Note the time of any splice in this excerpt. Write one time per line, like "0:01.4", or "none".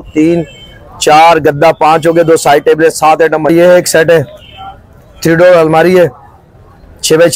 0:03.5